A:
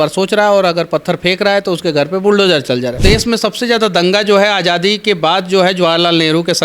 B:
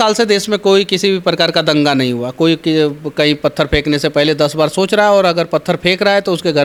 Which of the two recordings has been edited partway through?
A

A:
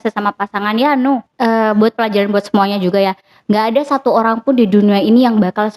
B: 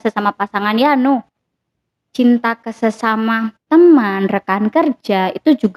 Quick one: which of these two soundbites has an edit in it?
A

